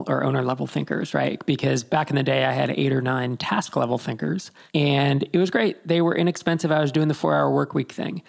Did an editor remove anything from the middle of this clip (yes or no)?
yes